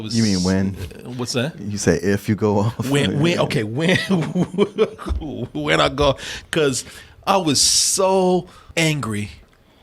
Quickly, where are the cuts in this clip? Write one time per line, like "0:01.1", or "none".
0:08.6